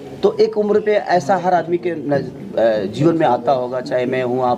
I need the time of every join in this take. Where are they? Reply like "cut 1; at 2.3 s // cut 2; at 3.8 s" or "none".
none